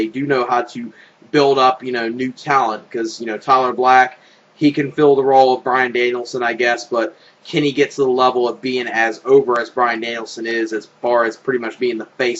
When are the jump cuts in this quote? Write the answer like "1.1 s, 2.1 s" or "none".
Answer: 9.2 s